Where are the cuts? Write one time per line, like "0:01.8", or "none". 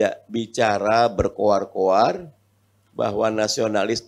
none